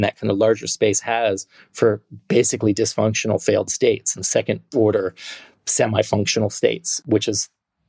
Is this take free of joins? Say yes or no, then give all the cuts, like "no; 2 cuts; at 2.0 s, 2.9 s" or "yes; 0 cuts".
no; 2 cuts; at 4.2 s, 6.9 s